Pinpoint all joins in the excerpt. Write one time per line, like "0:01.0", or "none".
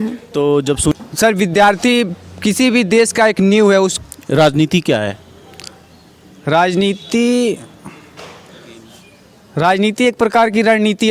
0:00.9
0:03.9